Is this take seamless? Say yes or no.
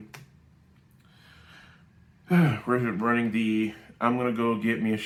yes